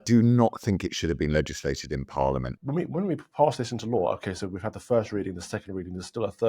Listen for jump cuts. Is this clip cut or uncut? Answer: cut